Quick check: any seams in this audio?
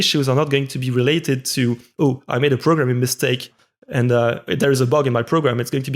no; 0 cuts

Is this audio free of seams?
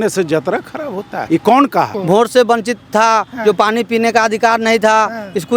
no; 2 cuts; at 1.1 s, 2.0 s

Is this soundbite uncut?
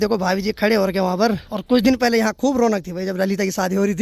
no; 1 cut; at 1.5 s

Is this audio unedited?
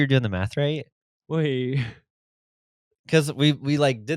yes; 0 cuts

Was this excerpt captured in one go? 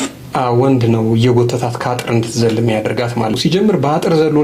no; 1 cut; at 3.4 s

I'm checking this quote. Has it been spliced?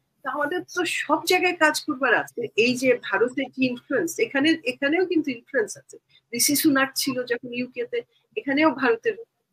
yes; 1 cut; at 2.4 s

